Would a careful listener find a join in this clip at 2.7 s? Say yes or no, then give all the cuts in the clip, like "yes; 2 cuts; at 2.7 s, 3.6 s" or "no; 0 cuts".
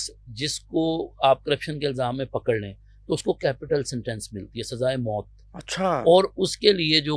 no; 0 cuts